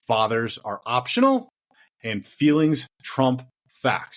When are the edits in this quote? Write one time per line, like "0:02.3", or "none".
none